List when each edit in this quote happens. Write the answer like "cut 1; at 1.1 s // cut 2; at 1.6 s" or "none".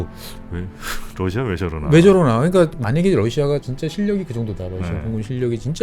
cut 1; at 2.7 s // cut 2; at 3.7 s

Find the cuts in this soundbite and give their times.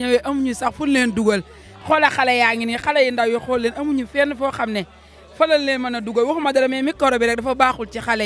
none

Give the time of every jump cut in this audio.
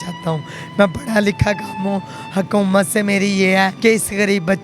cut 1; at 3.7 s

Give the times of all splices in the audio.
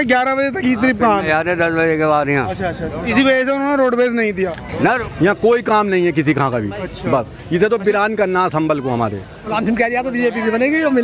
cut 1; at 4.9 s // cut 2; at 9.6 s

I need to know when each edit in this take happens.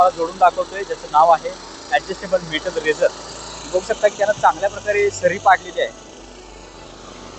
none

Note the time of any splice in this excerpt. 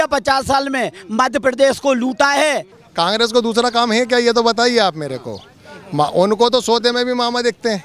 cut 1; at 2.7 s

